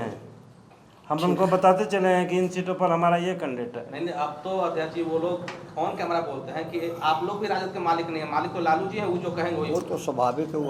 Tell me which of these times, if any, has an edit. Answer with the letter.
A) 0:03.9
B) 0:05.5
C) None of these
C